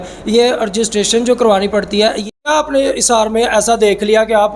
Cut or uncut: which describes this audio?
cut